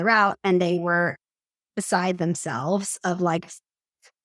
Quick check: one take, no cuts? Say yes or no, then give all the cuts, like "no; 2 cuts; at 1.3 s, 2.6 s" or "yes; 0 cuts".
yes; 0 cuts